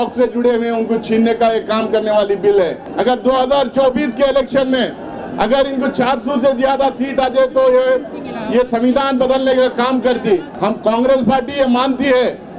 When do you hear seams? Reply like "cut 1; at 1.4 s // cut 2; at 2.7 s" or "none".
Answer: cut 1; at 2.8 s // cut 2; at 10.5 s